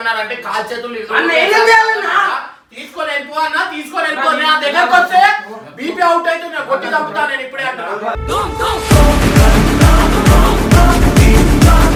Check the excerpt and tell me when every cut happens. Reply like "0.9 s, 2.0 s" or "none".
none